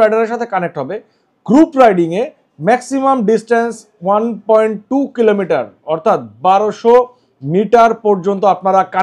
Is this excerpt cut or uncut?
uncut